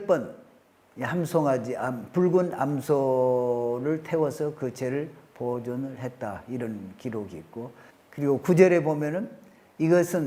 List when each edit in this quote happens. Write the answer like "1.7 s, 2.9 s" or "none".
none